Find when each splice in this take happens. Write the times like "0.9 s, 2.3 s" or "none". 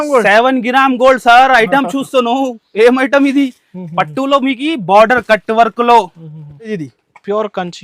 6.7 s

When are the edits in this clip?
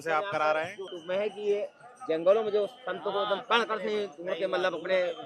0.9 s

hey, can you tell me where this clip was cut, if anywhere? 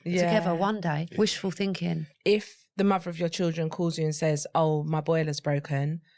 1.0 s, 2.1 s

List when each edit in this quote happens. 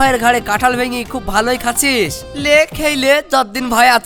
none

